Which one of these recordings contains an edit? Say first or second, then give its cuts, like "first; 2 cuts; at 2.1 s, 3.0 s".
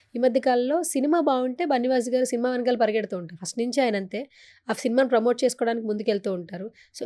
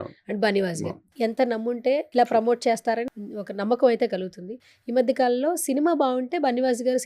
second; 3 cuts; at 1.1 s, 2.1 s, 3.1 s